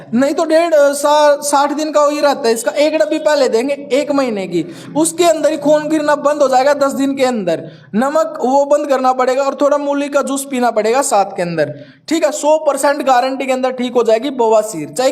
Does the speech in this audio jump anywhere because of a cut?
no; 0 cuts

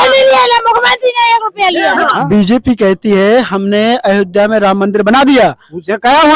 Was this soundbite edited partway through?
yes; 1 cut; at 2.1 s

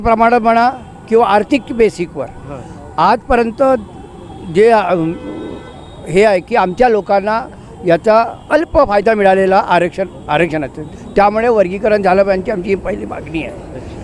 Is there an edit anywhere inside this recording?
no; 0 cuts

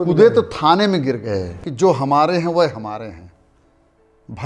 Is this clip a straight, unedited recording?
no; 1 cut; at 1.6 s

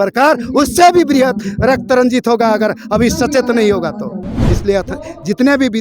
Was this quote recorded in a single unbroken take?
no; 1 cut; at 4.4 s

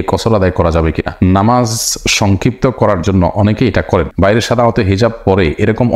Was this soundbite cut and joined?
yes; 1 cut; at 4.2 s

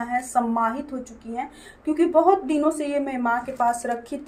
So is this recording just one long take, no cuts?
yes; 0 cuts

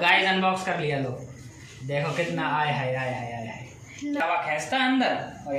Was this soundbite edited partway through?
yes; 1 cut; at 4.2 s

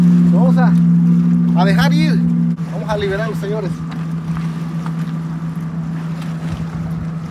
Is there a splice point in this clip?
yes; 1 cut; at 2.5 s

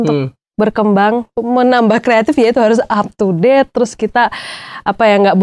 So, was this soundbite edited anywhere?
yes; 1 cut; at 1.3 s

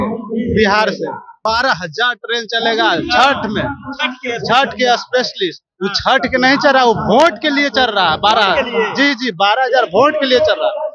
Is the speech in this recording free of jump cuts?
no; 1 cut; at 1.3 s

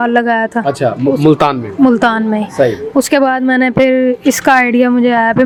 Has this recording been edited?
no; 0 cuts

